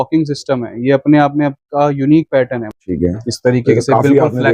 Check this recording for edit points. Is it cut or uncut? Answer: cut